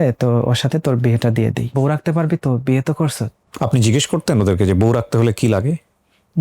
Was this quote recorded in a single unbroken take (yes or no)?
no